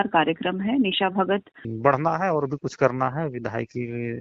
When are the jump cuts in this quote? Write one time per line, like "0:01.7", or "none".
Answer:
0:01.6